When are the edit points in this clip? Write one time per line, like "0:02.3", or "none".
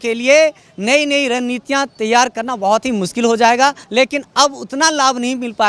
0:03.8